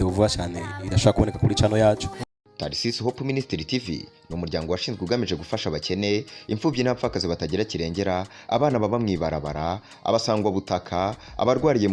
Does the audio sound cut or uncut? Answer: cut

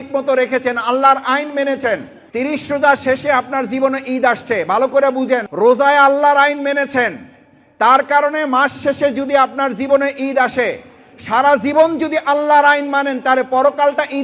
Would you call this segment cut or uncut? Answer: cut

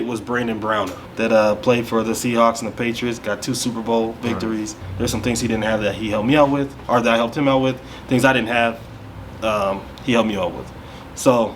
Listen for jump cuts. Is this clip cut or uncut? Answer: cut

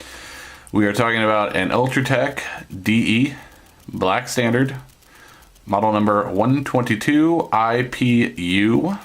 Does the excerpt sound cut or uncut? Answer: cut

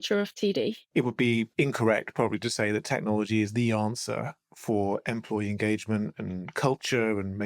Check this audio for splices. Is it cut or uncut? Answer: cut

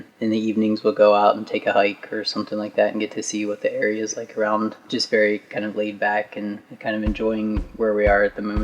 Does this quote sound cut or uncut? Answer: cut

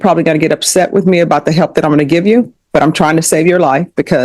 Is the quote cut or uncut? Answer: uncut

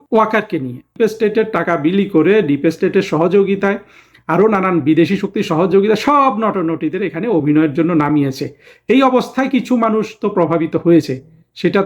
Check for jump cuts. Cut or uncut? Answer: cut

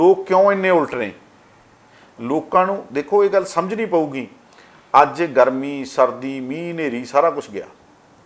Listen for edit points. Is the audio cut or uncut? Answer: uncut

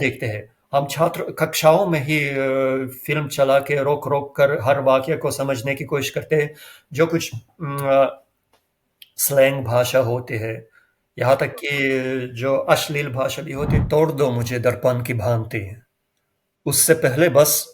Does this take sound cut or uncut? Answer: cut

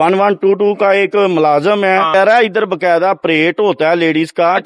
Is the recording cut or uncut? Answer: cut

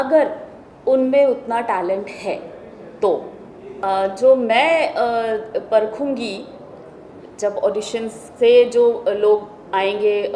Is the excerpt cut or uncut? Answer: cut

